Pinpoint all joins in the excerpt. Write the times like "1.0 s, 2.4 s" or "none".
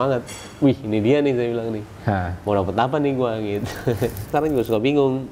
4.3 s